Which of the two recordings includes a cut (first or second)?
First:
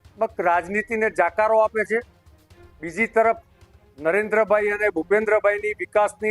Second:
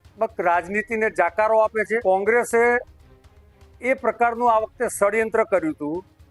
second